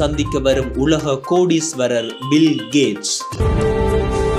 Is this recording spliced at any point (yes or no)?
yes